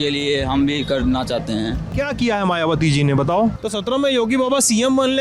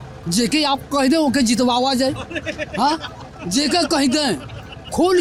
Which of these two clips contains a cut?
first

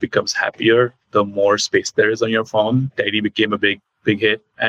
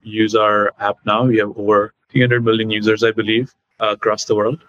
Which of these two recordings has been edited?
second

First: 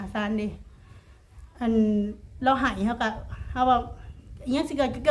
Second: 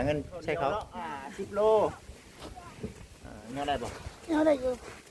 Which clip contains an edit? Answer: second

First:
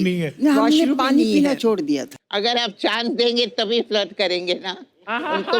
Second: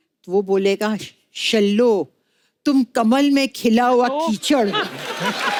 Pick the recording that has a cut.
first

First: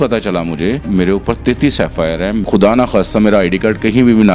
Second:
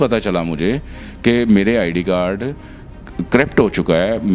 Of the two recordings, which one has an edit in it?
first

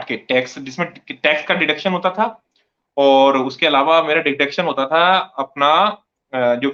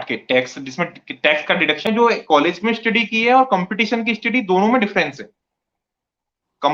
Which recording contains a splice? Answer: second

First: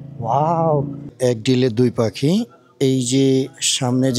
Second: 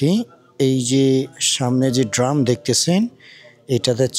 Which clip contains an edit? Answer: first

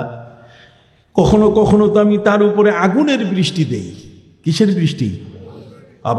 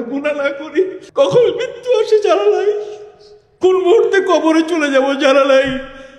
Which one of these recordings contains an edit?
second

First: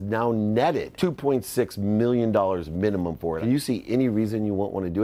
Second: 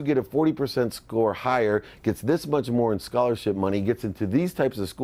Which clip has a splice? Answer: first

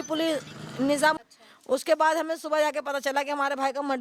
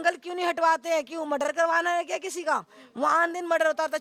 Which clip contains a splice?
first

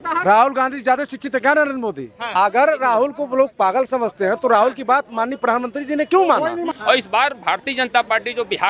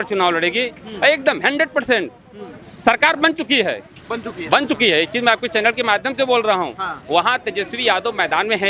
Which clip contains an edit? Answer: first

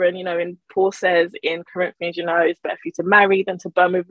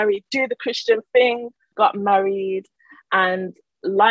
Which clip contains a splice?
second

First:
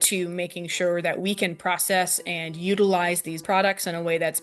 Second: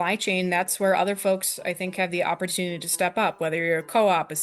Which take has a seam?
first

